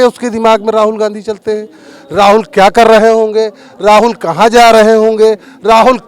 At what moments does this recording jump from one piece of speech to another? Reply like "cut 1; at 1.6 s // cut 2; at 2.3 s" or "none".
none